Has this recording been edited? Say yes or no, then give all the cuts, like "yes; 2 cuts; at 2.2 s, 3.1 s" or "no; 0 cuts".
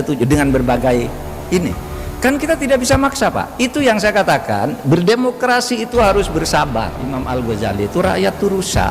yes; 1 cut; at 7.1 s